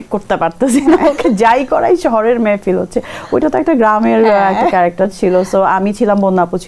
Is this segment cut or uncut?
uncut